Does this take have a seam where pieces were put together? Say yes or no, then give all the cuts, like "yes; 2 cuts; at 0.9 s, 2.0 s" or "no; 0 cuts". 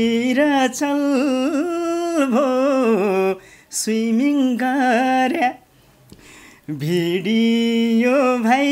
no; 0 cuts